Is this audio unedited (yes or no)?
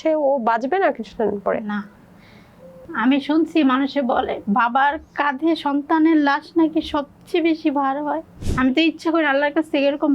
no